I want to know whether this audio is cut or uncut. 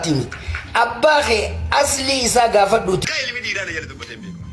cut